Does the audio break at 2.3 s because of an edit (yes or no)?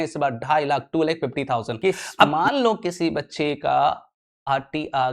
yes